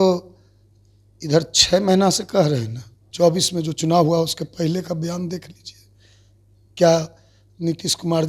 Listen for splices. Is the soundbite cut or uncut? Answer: cut